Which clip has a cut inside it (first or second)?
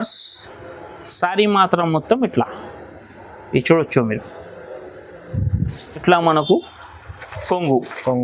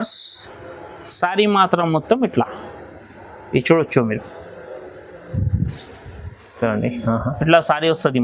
first